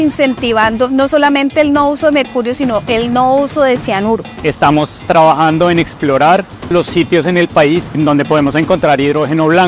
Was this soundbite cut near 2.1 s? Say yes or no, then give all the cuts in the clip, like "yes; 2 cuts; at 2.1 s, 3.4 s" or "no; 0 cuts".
no; 3 cuts; at 4.3 s, 6.7 s, 8.0 s